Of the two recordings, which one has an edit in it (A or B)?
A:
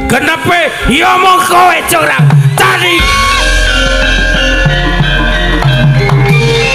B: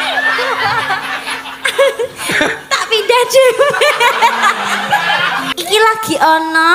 B